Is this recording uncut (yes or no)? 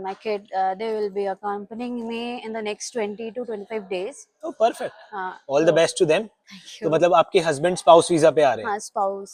yes